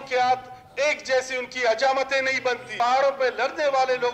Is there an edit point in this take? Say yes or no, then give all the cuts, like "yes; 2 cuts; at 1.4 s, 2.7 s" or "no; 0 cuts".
yes; 1 cut; at 2.7 s